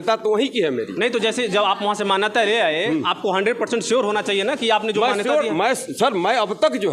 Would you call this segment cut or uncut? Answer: uncut